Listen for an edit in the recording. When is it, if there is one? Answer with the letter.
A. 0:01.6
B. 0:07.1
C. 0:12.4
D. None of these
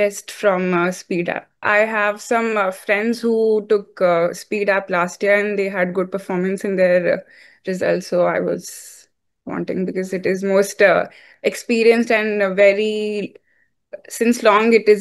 A